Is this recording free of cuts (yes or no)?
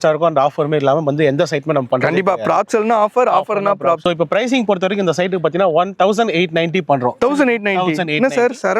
yes